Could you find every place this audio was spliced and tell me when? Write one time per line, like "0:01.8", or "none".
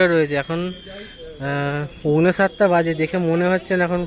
none